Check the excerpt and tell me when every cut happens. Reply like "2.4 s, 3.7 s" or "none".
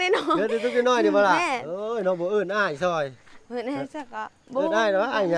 none